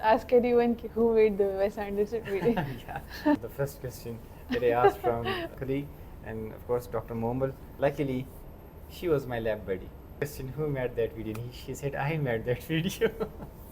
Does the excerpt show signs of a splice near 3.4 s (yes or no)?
yes